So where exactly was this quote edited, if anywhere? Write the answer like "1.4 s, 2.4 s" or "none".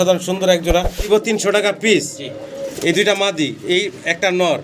1.1 s